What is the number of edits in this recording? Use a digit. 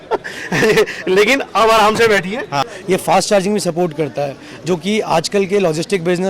1